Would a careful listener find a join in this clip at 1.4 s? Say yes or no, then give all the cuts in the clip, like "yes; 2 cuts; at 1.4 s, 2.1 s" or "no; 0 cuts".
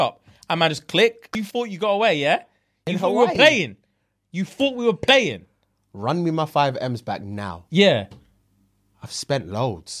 yes; 2 cuts; at 1.4 s, 2.9 s